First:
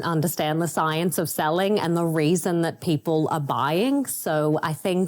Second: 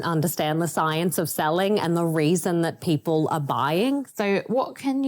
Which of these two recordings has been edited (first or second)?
second